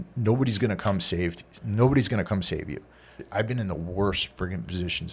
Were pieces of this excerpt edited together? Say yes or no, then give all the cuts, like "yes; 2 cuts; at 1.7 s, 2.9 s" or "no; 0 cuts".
yes; 1 cut; at 3.2 s